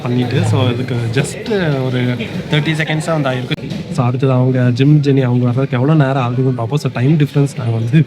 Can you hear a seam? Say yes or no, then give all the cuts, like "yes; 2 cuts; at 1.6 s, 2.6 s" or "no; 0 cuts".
yes; 1 cut; at 3.6 s